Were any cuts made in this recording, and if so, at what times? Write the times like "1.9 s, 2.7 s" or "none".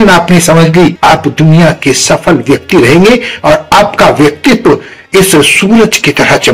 1.0 s